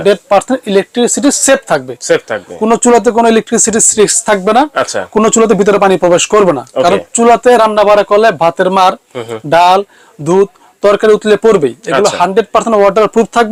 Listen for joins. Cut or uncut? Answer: uncut